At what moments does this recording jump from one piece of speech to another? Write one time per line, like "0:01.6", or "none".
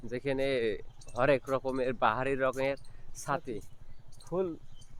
none